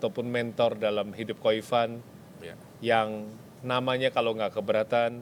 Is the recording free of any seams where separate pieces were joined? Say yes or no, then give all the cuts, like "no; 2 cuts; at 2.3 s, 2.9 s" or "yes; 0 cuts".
yes; 0 cuts